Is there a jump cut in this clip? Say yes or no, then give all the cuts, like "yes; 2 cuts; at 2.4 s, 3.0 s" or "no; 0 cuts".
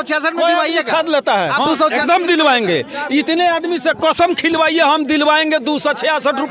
no; 0 cuts